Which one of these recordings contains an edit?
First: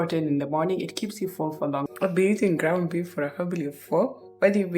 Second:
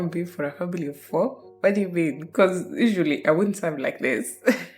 first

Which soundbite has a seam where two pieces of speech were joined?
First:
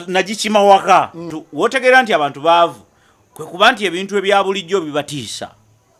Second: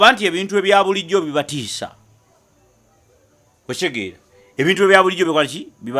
first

